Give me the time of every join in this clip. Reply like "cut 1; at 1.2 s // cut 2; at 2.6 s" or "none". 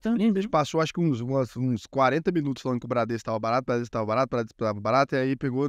none